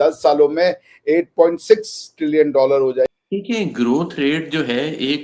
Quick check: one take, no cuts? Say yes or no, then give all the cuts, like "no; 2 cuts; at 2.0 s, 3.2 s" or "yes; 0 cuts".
no; 1 cut; at 3.1 s